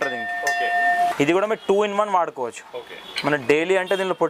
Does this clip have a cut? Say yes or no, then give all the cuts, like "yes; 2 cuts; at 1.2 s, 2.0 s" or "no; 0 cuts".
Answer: yes; 1 cut; at 1.1 s